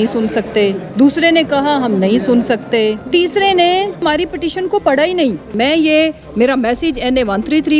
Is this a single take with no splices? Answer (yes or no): no